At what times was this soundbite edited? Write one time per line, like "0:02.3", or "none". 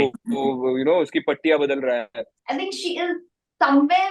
0:02.3